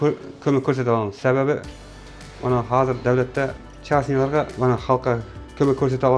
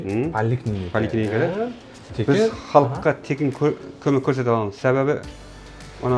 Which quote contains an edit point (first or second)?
first